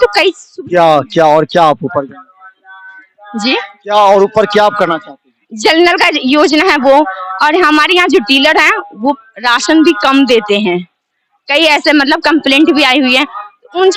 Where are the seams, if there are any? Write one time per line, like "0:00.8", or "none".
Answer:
none